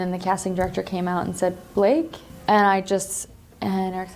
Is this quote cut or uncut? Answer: cut